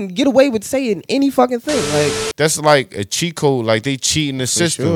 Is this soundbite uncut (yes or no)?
no